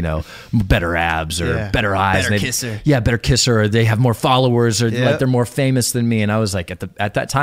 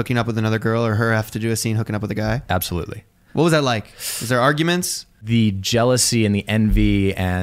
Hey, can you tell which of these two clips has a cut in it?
second; 1 cut; at 5.2 s

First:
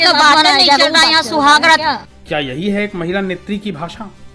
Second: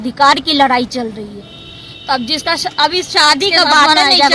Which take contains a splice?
first; 1 cut; at 1.8 s

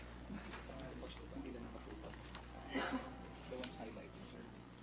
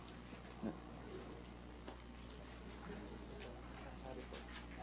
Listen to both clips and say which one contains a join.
second; 1 cut; at 3.5 s

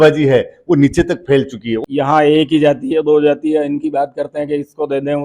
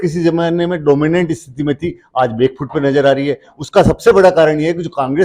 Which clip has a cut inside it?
first; 1 cut; at 1.7 s

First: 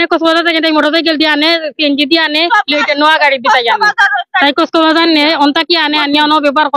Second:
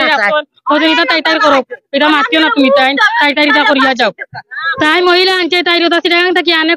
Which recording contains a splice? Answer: second; 1 cut; at 4.6 s

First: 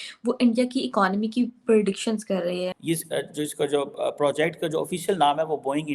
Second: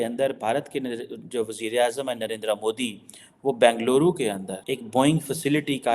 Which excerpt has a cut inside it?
first; 1 cut; at 2.7 s

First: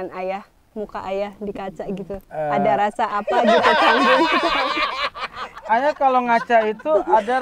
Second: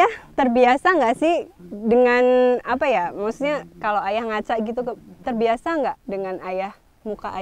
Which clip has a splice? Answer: first; 2 cuts; at 2.2 s, 5.6 s

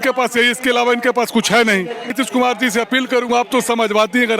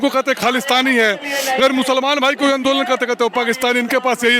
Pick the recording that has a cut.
first; 1 cut; at 2.1 s

